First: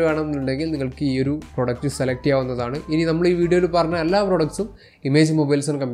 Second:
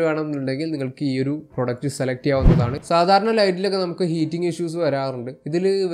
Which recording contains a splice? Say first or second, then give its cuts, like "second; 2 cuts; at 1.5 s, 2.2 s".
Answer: second; 1 cut; at 2.8 s